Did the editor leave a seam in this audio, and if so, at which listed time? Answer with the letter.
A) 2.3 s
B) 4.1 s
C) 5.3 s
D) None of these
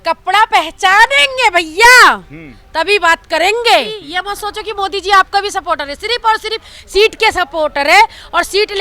B